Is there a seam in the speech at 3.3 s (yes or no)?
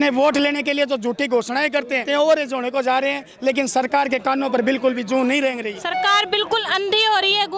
no